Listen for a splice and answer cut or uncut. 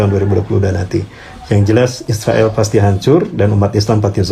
uncut